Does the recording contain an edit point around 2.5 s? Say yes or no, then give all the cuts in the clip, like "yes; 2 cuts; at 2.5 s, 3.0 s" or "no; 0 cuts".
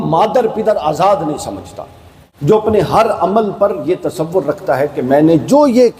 yes; 1 cut; at 2.5 s